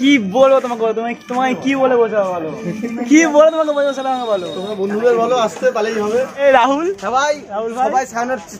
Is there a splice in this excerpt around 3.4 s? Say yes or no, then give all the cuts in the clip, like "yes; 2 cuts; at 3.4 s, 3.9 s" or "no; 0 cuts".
no; 1 cut; at 6.4 s